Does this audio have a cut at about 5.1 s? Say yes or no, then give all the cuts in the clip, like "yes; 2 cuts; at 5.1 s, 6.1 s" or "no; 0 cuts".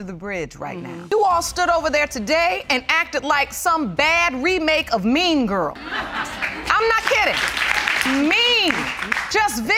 no; 0 cuts